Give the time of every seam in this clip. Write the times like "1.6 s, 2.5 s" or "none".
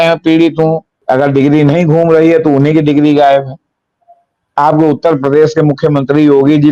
0.9 s

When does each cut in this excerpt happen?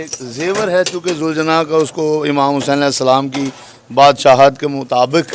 none

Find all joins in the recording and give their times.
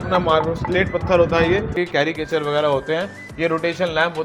1.7 s

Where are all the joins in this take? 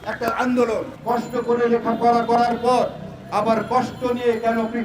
0.9 s

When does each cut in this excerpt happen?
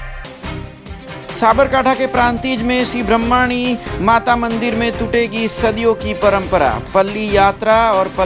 1.2 s

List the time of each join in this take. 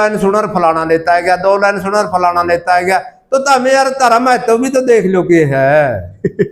none

